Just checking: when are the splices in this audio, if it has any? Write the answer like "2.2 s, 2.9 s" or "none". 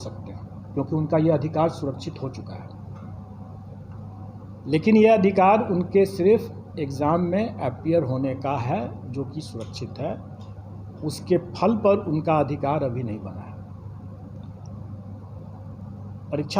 none